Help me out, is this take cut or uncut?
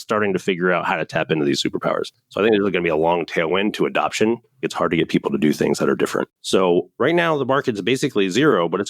cut